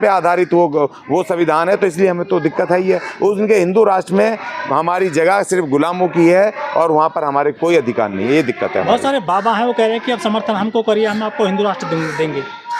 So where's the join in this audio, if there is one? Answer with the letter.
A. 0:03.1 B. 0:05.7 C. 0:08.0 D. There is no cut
D